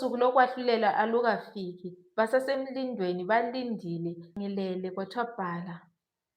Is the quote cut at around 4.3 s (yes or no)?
yes